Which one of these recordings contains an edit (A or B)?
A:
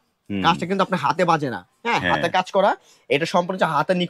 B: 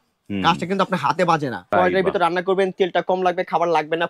B